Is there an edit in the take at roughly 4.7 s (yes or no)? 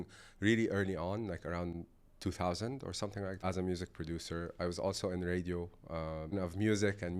no